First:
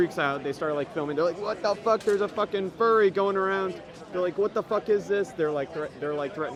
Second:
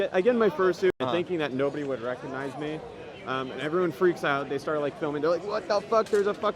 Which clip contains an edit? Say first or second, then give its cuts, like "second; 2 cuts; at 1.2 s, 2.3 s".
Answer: second; 1 cut; at 0.9 s